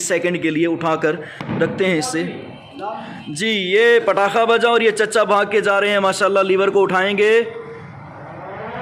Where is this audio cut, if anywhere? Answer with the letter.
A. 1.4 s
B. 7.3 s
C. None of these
C